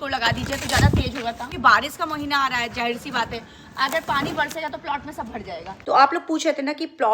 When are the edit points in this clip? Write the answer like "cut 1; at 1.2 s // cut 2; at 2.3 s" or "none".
cut 1; at 1.6 s // cut 2; at 5.7 s